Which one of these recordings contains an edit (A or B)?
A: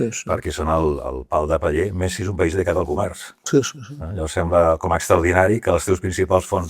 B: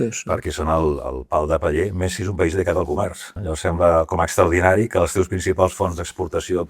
B